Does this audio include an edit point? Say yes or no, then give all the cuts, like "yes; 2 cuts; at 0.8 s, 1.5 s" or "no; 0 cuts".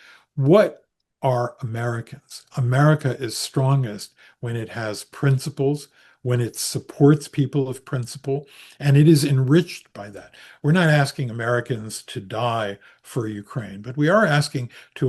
no; 0 cuts